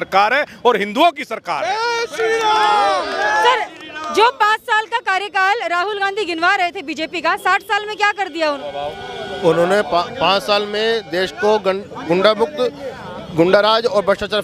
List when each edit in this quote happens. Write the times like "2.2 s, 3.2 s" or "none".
none